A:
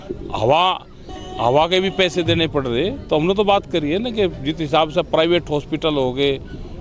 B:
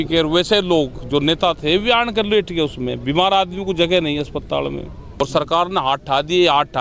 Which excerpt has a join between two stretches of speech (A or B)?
B